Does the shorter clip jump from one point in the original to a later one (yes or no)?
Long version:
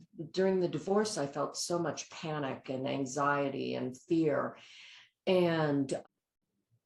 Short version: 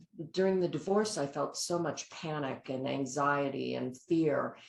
no